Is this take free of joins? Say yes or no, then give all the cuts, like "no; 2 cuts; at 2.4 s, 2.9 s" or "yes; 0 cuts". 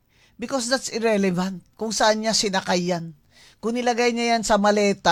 yes; 0 cuts